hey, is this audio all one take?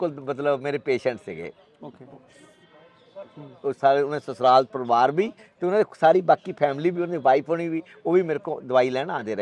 yes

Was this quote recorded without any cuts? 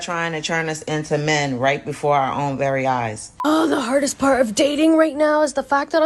no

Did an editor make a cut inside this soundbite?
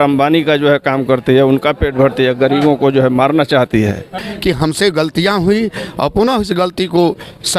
yes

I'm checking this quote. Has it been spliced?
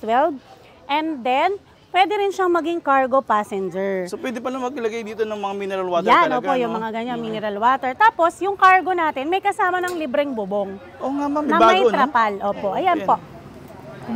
no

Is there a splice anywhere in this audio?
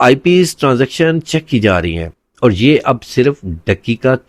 no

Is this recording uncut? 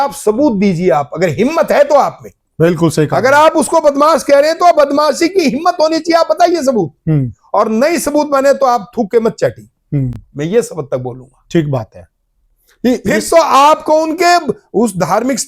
yes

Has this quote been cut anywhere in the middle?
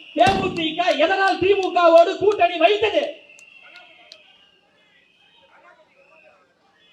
no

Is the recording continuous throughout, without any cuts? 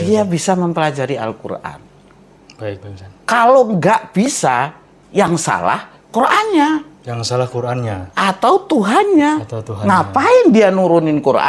yes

